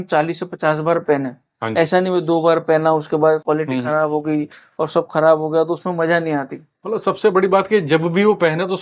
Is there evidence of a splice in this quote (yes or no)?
no